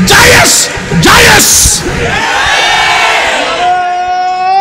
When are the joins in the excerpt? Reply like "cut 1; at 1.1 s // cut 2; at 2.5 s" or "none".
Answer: none

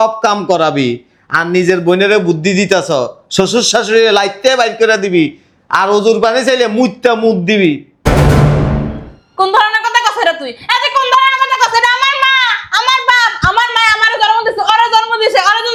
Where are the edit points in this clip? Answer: none

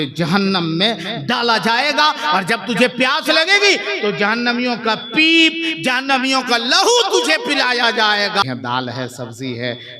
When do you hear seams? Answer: cut 1; at 8.4 s

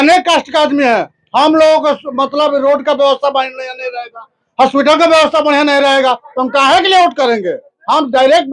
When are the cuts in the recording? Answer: none

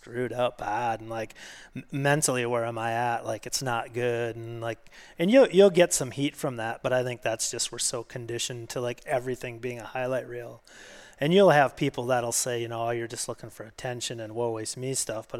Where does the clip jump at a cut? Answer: none

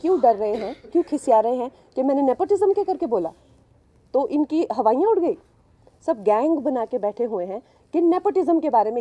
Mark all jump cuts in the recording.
none

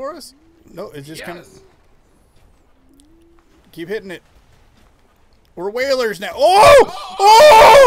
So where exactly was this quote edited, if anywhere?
none

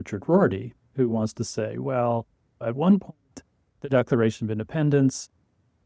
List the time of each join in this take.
none

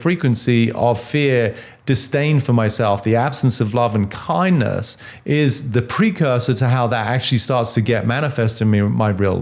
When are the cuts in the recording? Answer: none

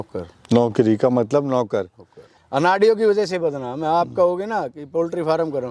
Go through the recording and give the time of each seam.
cut 1; at 2.0 s

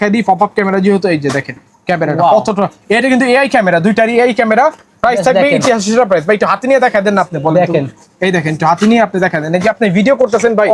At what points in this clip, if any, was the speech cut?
none

